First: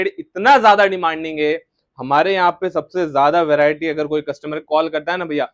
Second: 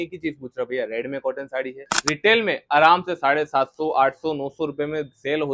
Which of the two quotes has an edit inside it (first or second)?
second